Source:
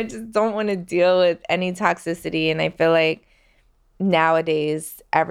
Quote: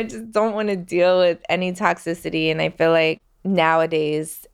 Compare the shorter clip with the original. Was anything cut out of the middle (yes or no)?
yes